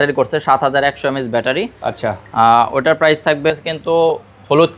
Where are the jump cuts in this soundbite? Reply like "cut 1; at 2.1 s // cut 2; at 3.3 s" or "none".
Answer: cut 1; at 3.5 s